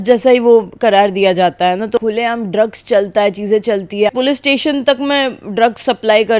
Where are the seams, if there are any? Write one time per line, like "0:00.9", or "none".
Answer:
0:02.0
0:04.1